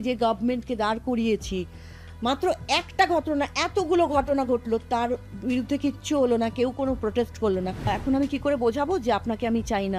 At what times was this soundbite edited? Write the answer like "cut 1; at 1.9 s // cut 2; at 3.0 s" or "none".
cut 1; at 7.9 s